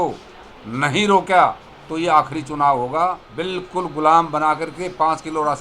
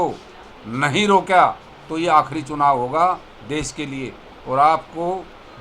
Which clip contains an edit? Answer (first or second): first